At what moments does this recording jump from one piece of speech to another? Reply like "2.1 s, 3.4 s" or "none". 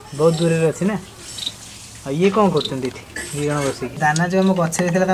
4.0 s

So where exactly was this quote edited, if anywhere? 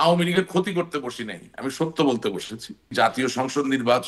2.9 s

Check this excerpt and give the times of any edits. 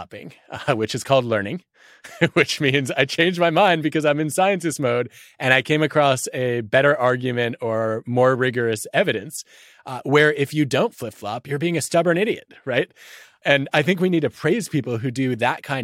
11.3 s, 13.3 s

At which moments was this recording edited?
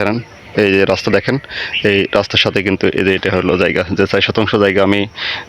none

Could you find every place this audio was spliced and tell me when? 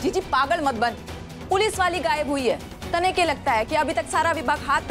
none

